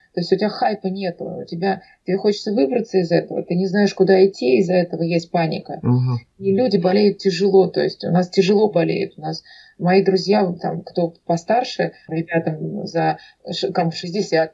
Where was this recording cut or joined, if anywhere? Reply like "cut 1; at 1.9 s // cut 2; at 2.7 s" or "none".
cut 1; at 12.1 s